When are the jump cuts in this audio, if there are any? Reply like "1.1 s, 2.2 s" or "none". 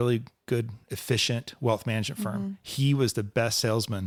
none